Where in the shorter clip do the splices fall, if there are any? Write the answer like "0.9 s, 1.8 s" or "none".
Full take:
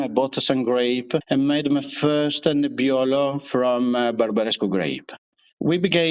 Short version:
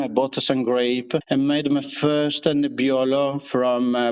none

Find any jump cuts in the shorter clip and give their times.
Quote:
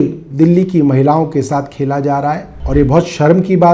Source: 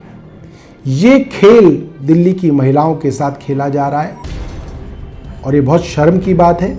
2.5 s

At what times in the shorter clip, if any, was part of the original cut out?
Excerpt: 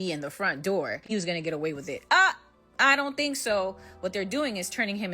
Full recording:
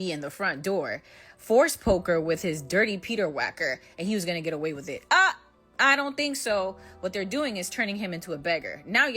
1.1 s

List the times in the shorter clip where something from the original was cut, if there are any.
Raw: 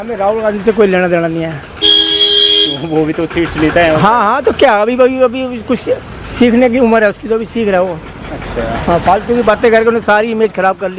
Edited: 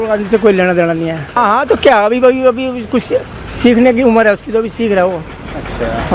1.4 s

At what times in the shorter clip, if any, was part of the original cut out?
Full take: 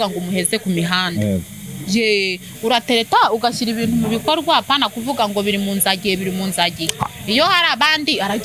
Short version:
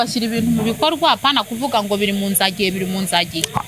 none

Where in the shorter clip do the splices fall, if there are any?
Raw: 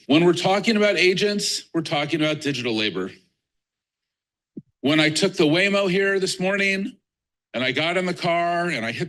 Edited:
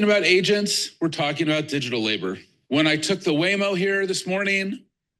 2.5 s

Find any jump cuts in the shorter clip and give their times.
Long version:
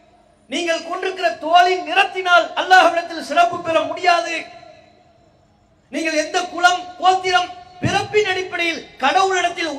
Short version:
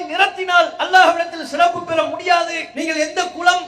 2.6 s

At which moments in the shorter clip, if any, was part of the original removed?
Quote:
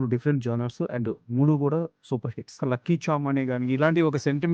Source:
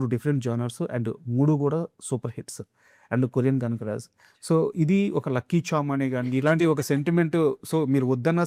2.6 s

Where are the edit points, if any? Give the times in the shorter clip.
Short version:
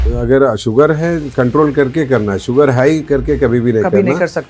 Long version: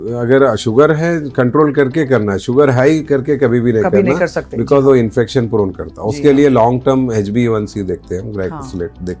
none

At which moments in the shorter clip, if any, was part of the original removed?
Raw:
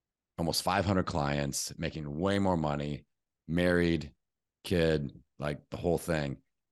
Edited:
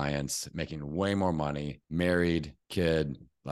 1.7 s, 2.6 s

